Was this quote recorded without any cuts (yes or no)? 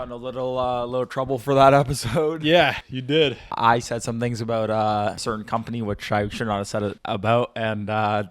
no